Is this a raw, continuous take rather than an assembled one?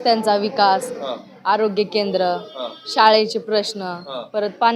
yes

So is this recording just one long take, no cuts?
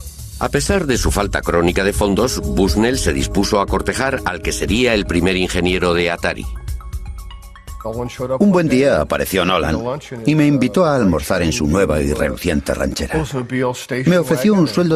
no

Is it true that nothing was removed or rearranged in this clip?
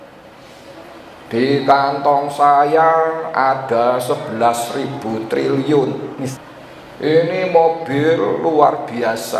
no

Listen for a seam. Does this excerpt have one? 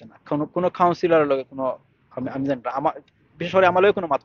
no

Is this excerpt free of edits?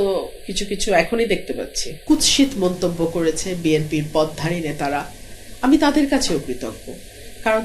no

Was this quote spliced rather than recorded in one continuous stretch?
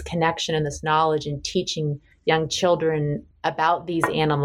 yes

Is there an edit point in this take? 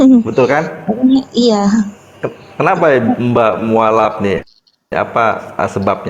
no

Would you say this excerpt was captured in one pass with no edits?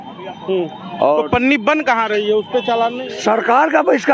no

